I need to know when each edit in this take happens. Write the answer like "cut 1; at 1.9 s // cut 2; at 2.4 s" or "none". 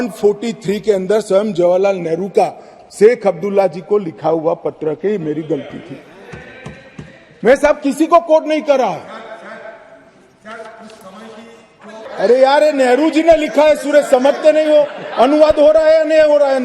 cut 1; at 12.1 s